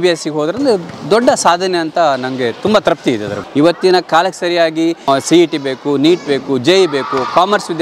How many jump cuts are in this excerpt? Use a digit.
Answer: 2